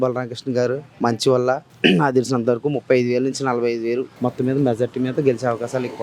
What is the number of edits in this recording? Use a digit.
2